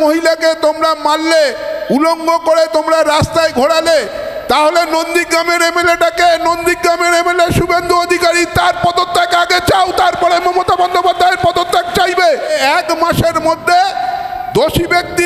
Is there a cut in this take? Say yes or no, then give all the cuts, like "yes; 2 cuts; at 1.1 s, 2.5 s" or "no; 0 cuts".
yes; 1 cut; at 12.5 s